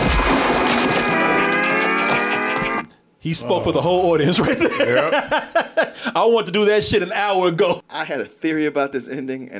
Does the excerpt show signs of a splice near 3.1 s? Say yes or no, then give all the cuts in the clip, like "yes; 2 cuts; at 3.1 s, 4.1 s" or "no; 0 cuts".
no; 1 cut; at 7.9 s